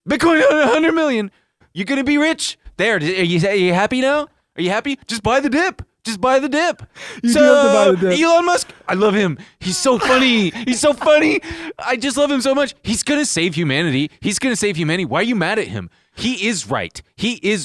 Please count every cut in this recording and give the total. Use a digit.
1